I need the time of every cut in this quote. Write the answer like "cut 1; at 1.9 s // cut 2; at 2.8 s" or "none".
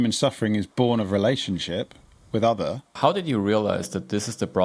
cut 1; at 2.9 s